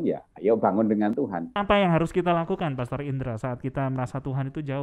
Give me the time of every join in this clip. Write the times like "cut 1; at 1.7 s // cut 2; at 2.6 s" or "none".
cut 1; at 1.6 s